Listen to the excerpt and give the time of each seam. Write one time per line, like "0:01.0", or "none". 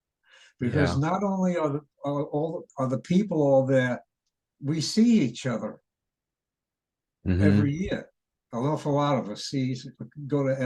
none